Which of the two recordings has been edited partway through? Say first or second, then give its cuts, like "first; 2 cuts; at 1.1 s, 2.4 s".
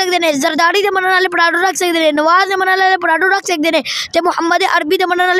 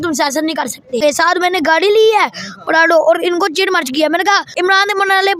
second; 2 cuts; at 1.0 s, 4.5 s